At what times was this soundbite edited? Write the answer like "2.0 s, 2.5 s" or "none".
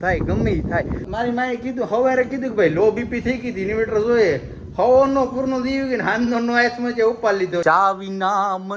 1.0 s, 7.6 s